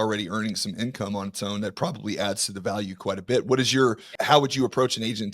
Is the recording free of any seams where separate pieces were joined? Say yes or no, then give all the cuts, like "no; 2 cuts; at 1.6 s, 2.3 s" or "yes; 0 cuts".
no; 1 cut; at 4.1 s